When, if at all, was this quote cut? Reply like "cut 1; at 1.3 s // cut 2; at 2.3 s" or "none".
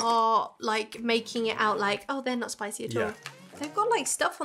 none